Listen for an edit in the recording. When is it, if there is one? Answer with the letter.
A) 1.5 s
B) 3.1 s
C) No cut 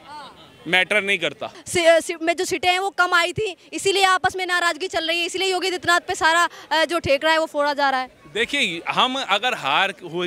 A